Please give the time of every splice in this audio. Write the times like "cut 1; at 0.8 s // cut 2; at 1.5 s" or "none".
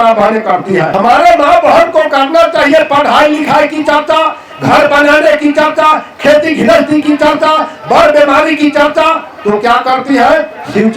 cut 1; at 0.9 s